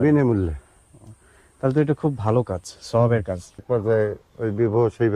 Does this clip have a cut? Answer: yes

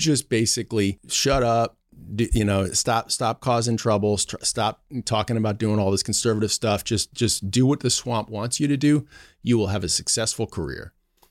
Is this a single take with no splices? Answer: no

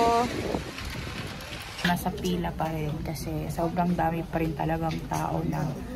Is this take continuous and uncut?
no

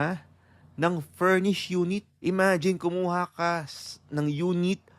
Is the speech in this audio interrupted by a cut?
yes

